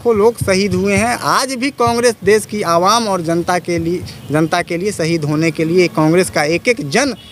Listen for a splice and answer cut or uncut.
uncut